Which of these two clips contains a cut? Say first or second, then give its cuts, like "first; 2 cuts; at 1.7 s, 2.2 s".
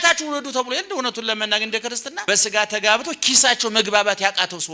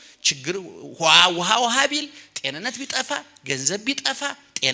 first; 1 cut; at 2.2 s